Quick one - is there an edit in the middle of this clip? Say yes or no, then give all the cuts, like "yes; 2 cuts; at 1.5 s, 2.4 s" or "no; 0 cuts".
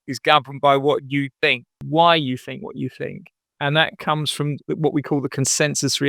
yes; 1 cut; at 1.8 s